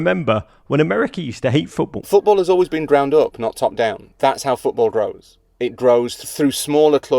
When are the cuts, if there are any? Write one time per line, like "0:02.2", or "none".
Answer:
0:02.0
0:06.2

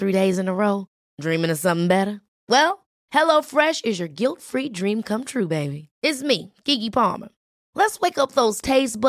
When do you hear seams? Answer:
none

